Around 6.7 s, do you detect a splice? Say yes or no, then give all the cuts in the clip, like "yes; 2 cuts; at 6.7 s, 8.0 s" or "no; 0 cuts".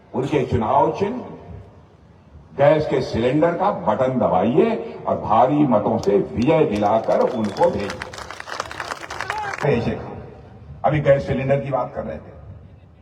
no; 1 cut; at 9.6 s